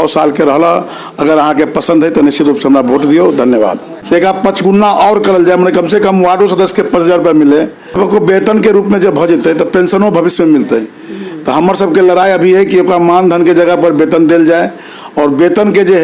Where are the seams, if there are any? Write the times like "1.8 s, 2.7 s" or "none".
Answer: 3.9 s, 7.9 s